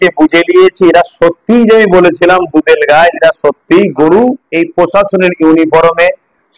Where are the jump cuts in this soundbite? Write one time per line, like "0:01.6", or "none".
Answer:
0:04.4